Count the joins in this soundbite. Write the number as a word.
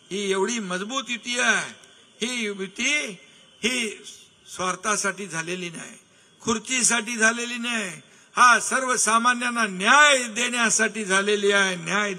zero